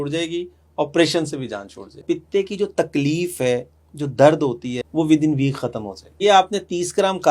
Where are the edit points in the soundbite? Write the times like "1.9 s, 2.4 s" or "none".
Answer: 2.0 s, 4.7 s, 6.0 s